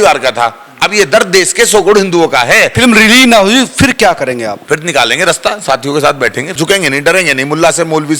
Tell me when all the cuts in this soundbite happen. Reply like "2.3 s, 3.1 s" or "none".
2.7 s, 4.6 s, 6.6 s